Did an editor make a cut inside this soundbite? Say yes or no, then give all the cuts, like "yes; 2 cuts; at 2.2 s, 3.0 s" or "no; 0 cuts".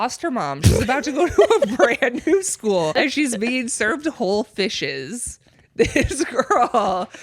yes; 1 cut; at 2.9 s